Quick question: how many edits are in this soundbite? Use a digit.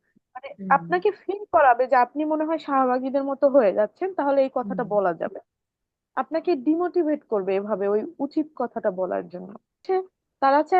1